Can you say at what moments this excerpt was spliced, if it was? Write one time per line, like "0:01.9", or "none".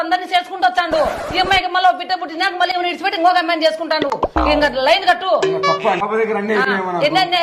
0:06.0

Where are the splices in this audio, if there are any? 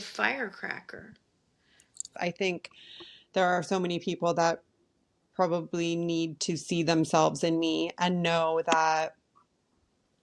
0:02.1

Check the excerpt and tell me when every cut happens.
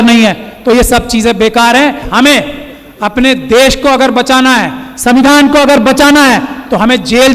0:02.1

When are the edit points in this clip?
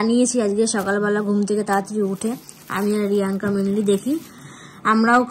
none

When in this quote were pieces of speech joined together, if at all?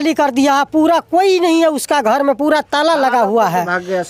none

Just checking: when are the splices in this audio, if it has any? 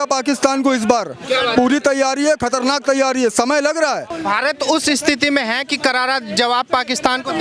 0:04.1

